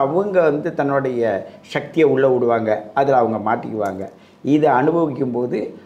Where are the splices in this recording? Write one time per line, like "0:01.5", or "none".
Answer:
none